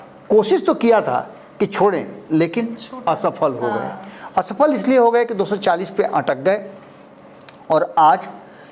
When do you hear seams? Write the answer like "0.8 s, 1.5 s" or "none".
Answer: none